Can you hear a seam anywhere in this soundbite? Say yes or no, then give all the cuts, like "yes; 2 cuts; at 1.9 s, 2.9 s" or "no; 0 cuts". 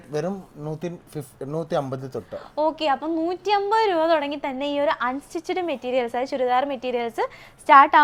no; 0 cuts